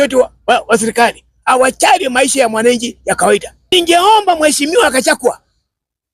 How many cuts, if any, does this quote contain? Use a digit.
1